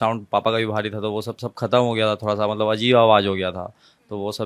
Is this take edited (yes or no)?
no